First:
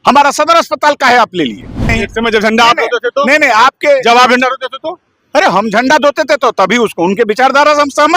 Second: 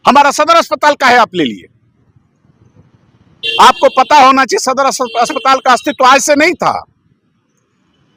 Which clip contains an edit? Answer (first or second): first